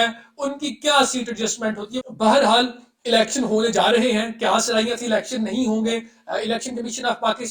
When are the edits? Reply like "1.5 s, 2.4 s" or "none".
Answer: 2.1 s